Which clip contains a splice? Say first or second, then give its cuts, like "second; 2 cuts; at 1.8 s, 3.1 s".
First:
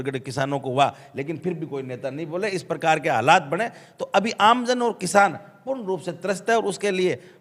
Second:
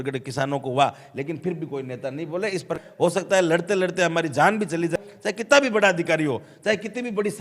second; 2 cuts; at 2.8 s, 4.9 s